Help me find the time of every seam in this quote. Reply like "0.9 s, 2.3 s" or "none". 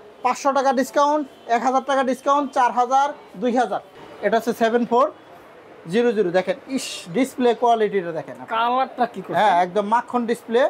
4.0 s